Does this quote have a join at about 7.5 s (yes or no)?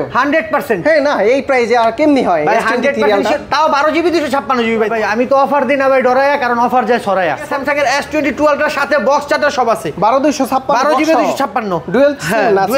yes